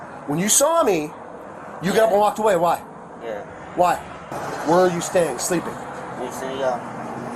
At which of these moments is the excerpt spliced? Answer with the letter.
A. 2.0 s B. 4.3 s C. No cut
B